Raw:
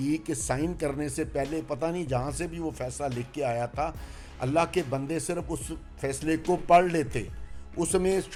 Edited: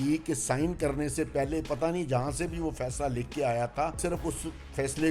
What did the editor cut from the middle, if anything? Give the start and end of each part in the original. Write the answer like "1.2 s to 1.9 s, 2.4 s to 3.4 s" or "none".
4.0 s to 5.2 s